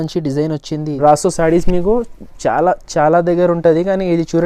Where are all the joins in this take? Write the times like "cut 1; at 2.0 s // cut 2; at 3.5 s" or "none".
cut 1; at 0.9 s